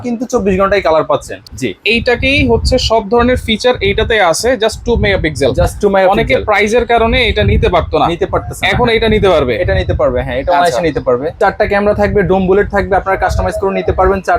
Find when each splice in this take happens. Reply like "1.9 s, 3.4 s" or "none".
1.5 s, 11.3 s